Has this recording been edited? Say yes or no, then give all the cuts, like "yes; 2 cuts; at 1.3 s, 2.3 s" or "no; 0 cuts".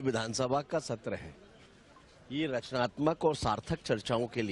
no; 0 cuts